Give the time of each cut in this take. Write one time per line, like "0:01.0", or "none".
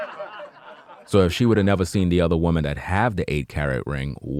none